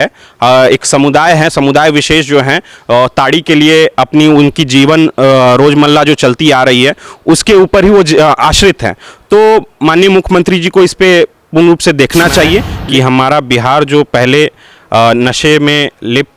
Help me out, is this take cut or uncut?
cut